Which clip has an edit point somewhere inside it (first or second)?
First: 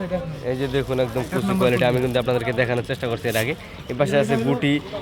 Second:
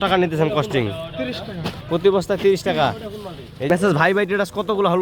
second